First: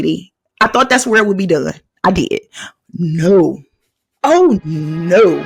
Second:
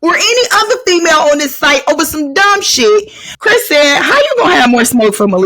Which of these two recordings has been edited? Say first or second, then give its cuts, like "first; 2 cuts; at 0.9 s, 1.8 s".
second; 1 cut; at 3.2 s